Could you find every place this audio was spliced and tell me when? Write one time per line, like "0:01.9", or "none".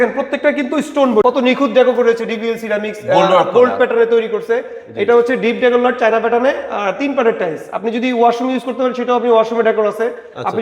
0:01.2